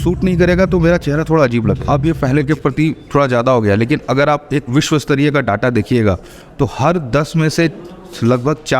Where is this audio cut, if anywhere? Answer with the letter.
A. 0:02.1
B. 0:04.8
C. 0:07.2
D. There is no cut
A